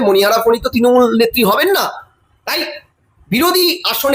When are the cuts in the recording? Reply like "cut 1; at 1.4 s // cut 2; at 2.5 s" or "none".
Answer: none